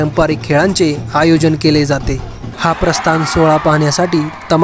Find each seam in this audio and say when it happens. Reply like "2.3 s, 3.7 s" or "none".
2.4 s